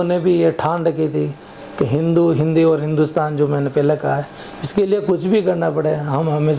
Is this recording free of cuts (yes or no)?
yes